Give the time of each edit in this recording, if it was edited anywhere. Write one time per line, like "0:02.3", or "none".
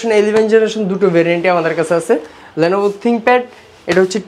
none